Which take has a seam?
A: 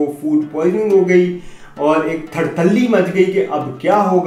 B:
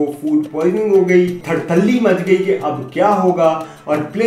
B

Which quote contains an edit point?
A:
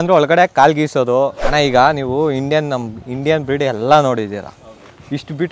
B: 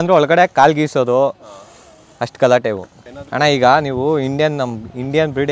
A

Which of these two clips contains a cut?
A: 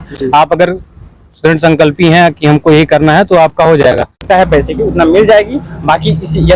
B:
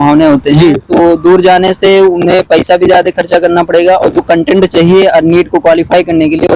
A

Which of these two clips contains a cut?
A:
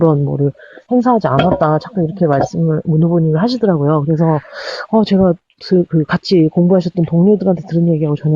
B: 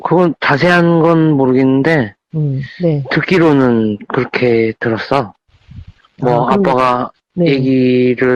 A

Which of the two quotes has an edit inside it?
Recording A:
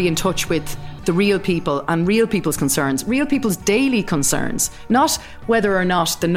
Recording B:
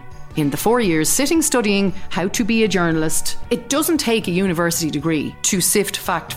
B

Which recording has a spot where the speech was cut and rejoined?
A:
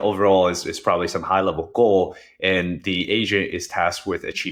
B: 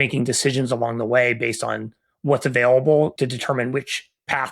B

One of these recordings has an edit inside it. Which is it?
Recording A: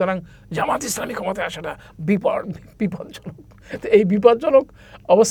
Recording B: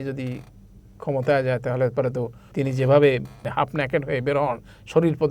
B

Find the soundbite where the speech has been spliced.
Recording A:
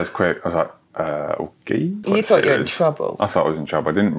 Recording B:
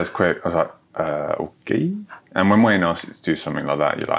A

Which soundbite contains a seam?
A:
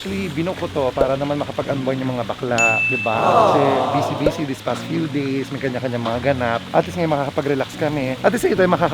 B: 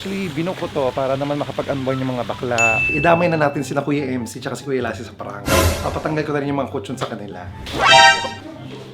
B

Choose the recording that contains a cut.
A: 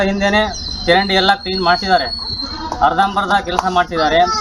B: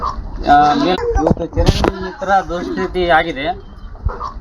B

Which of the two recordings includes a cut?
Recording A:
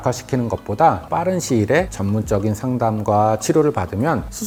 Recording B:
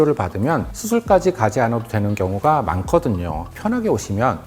B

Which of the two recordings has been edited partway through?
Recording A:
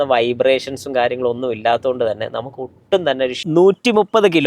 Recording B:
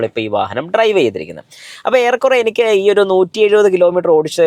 A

